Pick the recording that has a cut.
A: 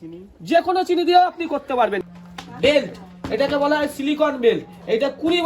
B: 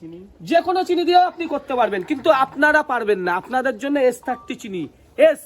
A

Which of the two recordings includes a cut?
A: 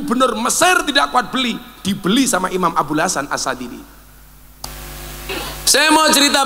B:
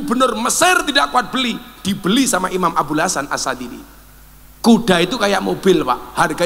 A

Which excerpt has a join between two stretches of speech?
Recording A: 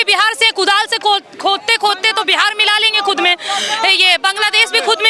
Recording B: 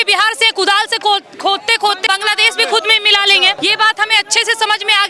B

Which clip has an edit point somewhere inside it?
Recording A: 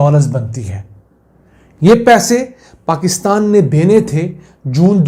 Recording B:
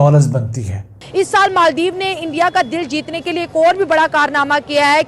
B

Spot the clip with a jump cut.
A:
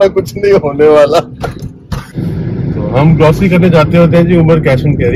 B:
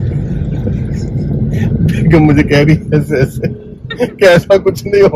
A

